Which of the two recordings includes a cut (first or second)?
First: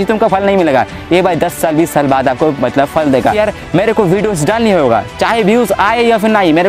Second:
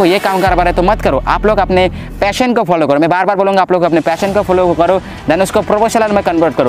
first